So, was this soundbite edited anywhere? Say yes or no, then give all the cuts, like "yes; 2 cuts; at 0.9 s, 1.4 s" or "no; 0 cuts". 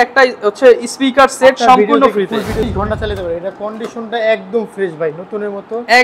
yes; 1 cut; at 2.7 s